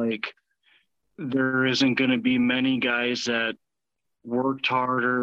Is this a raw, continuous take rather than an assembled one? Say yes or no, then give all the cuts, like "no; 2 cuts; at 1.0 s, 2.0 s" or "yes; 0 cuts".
yes; 0 cuts